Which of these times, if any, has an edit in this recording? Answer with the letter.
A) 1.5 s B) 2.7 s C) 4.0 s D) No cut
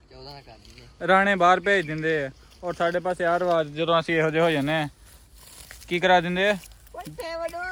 D